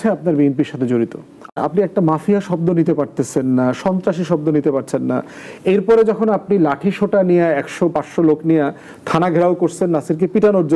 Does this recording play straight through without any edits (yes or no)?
no